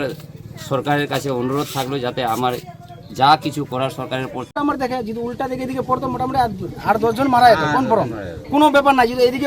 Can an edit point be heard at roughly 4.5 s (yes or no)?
yes